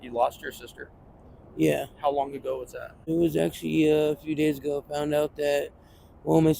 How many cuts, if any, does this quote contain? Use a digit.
1